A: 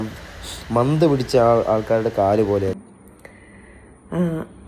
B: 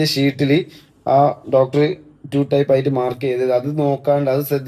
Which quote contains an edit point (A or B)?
A